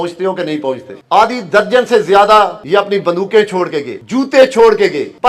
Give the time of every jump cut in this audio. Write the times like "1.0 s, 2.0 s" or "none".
1.0 s, 2.6 s